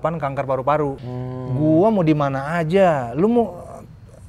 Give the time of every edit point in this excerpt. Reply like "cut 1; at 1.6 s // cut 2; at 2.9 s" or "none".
cut 1; at 1.0 s